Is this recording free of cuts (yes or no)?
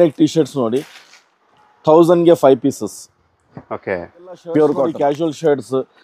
no